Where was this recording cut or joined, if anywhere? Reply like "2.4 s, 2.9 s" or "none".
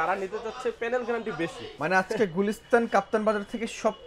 1.7 s